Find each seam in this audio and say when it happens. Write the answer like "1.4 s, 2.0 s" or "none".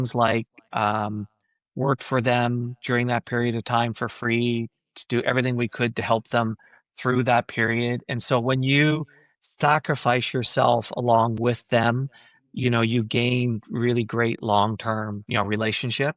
15.2 s

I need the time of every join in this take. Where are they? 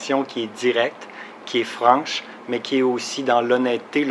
none

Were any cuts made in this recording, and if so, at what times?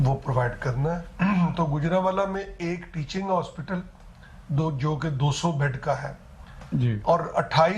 1.1 s

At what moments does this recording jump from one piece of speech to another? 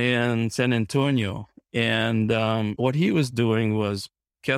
2.7 s

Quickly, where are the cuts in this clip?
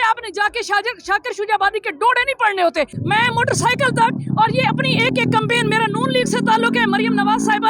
3.0 s

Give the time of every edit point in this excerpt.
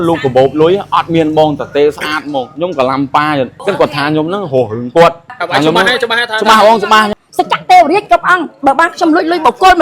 3.6 s, 5.3 s, 7.1 s

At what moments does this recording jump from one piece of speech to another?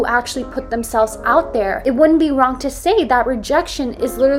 1.8 s

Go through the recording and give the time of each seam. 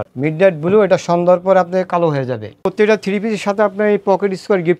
2.6 s

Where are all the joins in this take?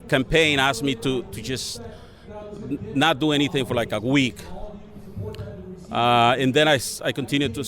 5.5 s

